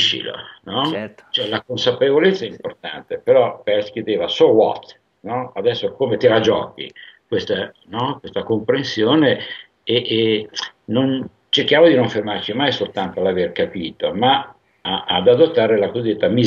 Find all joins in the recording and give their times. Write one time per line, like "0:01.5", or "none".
none